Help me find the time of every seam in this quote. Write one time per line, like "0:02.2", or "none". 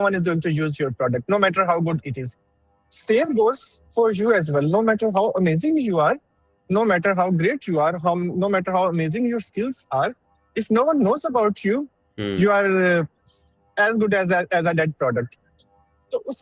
none